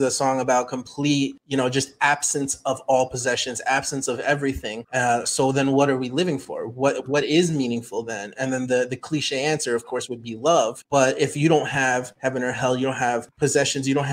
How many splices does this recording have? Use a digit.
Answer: 5